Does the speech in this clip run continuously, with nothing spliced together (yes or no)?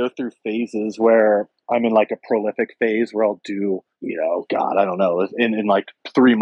no